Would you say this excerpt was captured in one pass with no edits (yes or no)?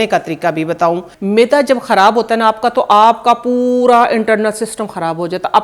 no